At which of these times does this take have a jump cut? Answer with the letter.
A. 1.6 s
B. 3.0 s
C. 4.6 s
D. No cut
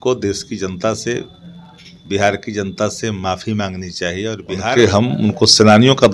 C